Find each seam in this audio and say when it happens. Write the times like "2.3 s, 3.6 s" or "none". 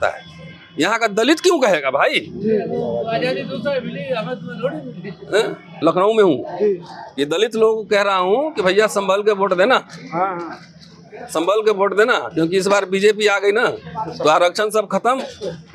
5.6 s